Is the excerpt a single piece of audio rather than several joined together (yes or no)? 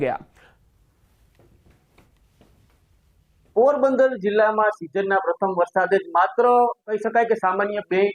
no